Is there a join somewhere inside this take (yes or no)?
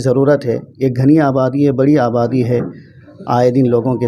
no